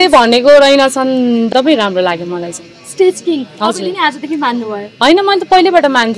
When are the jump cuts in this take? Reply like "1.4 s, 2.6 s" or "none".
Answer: 1.5 s